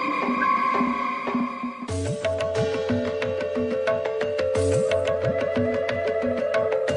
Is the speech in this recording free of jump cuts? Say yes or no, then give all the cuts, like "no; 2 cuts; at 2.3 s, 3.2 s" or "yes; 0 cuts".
no; 1 cut; at 1.3 s